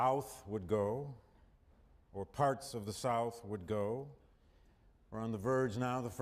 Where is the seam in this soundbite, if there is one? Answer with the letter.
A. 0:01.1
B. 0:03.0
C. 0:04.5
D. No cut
A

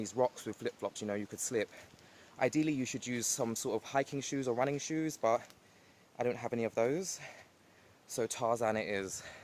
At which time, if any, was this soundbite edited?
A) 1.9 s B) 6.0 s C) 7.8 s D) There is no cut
D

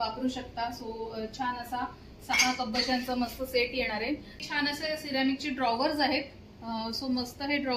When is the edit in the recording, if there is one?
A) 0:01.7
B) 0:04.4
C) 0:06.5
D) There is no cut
B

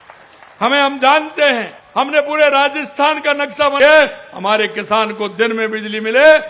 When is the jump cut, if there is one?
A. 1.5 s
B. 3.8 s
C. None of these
B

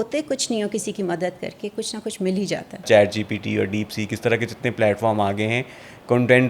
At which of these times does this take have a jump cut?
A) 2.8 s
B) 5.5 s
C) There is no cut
A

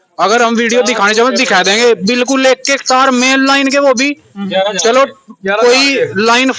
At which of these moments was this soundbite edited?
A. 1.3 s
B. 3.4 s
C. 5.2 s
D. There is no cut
D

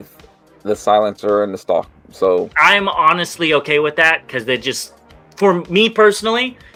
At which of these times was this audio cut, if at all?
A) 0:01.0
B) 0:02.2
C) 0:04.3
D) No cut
D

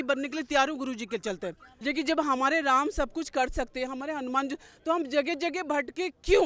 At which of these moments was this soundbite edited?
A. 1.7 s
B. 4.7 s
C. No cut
A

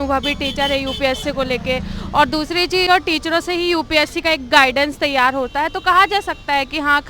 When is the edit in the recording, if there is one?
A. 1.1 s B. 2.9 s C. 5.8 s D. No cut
B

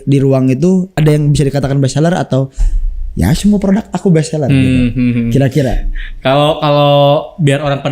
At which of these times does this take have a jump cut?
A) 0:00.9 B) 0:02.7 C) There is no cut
A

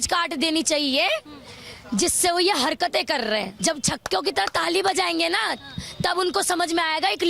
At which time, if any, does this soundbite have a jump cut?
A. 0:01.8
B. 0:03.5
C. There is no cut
B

